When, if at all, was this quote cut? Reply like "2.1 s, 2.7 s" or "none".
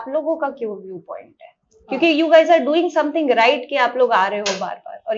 none